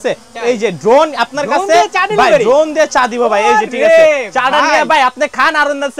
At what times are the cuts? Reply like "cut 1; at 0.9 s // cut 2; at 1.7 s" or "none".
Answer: none